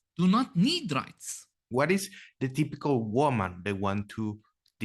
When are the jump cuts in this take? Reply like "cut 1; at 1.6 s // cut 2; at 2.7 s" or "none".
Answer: cut 1; at 1.7 s